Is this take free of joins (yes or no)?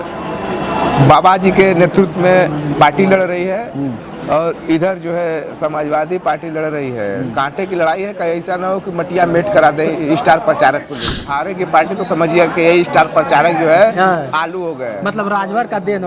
no